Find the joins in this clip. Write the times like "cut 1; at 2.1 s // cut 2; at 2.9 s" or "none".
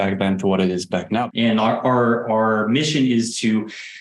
cut 1; at 1.3 s